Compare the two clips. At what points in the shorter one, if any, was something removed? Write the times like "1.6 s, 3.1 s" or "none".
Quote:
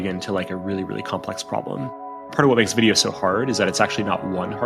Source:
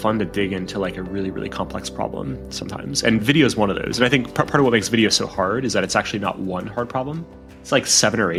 2.3 s

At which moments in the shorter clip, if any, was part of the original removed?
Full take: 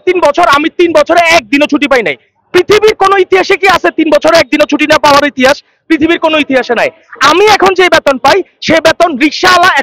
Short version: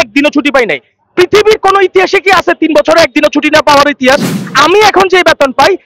4.4 s

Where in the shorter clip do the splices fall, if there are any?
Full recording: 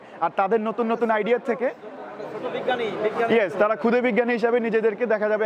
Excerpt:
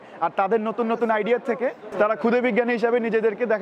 1.9 s

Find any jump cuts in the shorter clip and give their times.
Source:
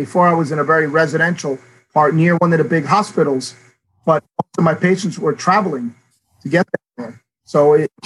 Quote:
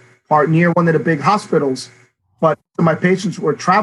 2.7 s

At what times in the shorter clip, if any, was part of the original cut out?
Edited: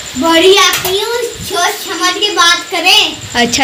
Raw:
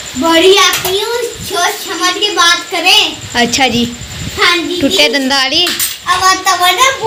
none

